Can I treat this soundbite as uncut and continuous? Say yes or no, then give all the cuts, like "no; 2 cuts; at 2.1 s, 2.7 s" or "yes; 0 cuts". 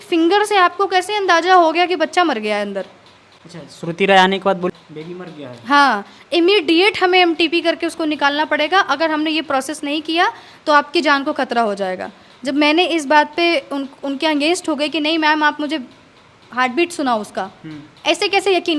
no; 1 cut; at 4.7 s